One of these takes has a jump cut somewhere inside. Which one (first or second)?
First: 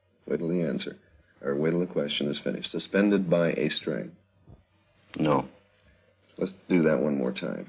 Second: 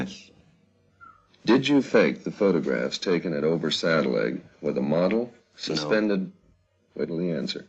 first